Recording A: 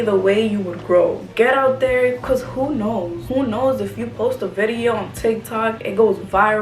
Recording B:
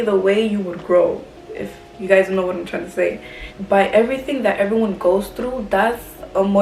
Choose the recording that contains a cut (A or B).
A